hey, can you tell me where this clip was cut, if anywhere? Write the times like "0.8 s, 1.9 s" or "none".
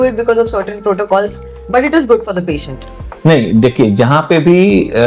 none